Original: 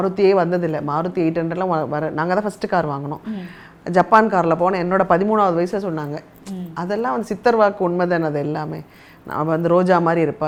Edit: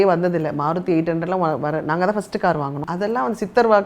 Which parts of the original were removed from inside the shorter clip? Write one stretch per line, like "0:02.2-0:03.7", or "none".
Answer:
0:03.1-0:06.7